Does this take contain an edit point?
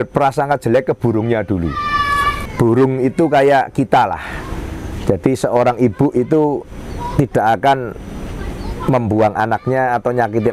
yes; 1 cut; at 2.4 s

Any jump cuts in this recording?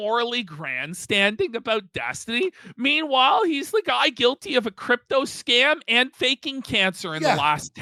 no; 0 cuts

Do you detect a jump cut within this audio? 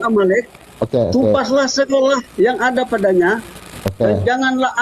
yes; 1 cut; at 2.3 s

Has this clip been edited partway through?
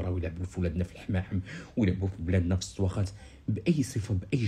no; 0 cuts

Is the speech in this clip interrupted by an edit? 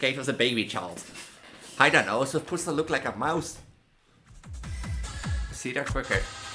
yes; 1 cut; at 4.6 s

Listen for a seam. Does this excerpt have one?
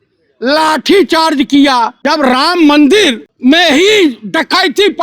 yes; 2 cuts; at 2.0 s, 3.3 s

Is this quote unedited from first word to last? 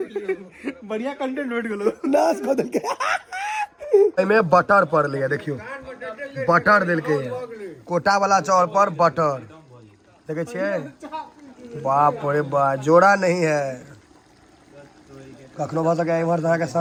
yes; 0 cuts

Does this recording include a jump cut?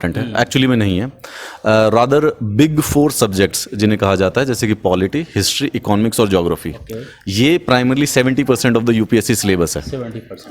no; 0 cuts

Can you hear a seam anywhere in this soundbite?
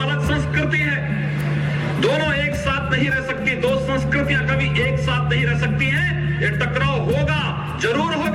no; 0 cuts

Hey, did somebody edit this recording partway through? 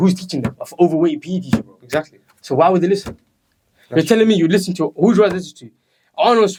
no; 0 cuts

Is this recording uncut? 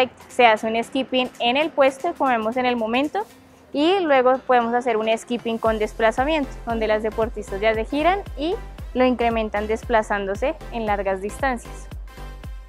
no; 1 cut; at 11.6 s

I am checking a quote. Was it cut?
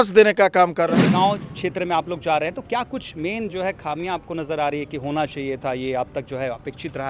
yes; 1 cut; at 1.0 s

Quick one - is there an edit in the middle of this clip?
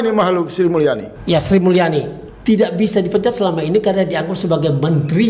yes; 2 cuts; at 1.1 s, 2.2 s

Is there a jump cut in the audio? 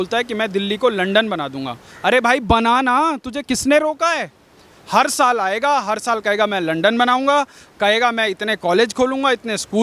no; 0 cuts

